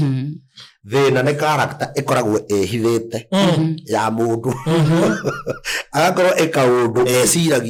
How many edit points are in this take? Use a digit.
0